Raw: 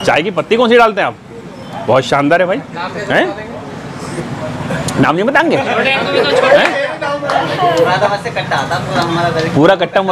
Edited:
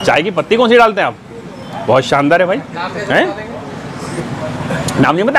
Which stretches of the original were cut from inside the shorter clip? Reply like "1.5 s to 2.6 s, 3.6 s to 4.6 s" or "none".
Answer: none

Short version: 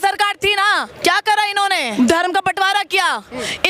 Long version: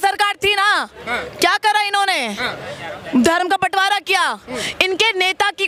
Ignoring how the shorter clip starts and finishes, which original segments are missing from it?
0.9 s to 1.3 s, 2.3 s to 3.0 s

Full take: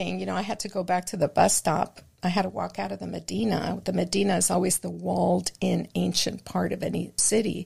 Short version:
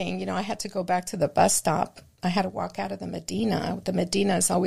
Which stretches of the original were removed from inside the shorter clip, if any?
none

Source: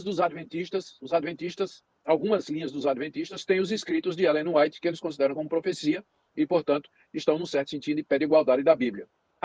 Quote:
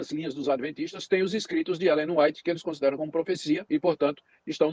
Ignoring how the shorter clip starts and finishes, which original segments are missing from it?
6.0 s to 6.3 s

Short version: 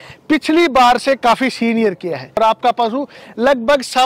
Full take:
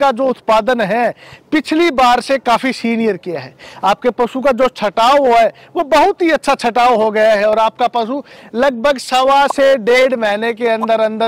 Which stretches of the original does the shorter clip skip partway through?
3.6 s to 7.5 s

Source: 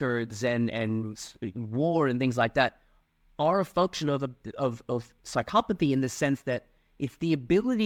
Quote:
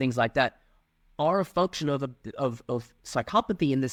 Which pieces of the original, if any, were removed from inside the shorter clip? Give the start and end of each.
none

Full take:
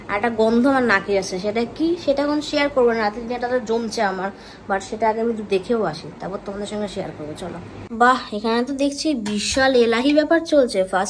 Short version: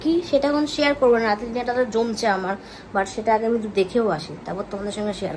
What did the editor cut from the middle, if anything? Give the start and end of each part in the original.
none

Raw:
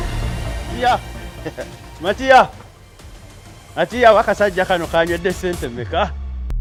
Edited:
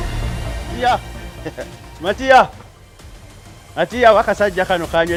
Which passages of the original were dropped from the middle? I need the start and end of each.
none

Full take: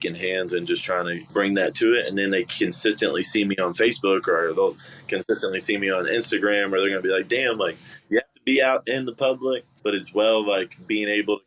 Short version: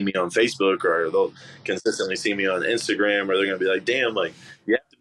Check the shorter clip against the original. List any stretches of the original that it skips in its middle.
none

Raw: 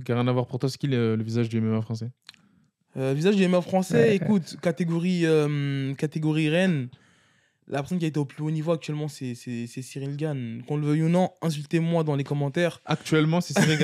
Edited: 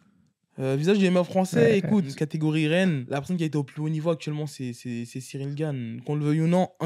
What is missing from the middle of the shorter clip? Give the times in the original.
4.5 s to 6.0 s, 6.8 s to 7.6 s

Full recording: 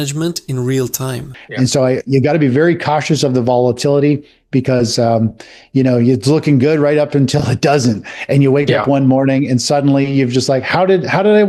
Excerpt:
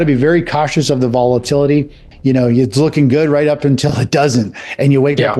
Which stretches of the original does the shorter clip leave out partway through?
4.3 s to 5.5 s

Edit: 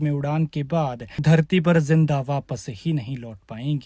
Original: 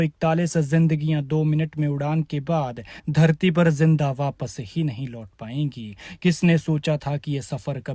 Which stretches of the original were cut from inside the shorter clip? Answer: 2.8 s to 3.0 s

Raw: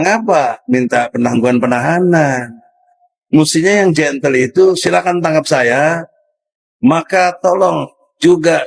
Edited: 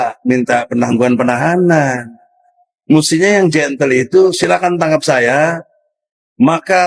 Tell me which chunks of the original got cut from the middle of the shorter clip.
none

